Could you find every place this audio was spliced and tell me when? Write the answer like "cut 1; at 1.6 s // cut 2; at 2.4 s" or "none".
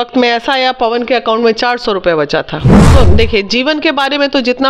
cut 1; at 2.9 s